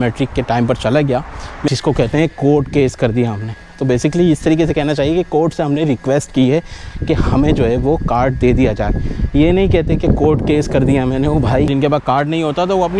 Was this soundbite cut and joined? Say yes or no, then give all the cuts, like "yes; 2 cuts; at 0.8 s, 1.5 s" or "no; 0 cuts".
yes; 2 cuts; at 1.7 s, 11.7 s